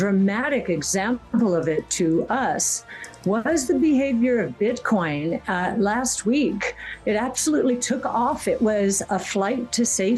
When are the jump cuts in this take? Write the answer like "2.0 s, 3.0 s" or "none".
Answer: none